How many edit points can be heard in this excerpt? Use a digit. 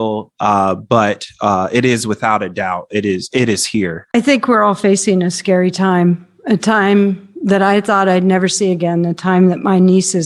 1